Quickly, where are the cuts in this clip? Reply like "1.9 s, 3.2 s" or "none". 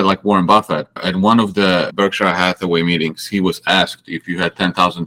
1.0 s, 1.9 s